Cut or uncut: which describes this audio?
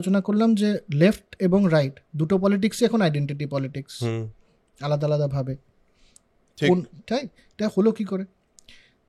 uncut